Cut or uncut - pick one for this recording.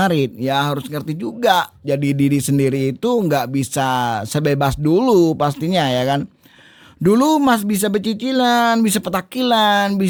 uncut